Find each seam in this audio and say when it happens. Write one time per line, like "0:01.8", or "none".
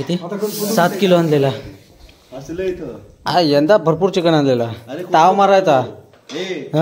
none